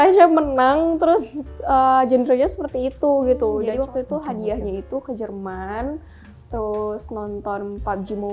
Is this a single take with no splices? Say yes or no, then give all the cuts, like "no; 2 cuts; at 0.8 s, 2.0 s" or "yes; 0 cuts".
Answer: no; 1 cut; at 3.7 s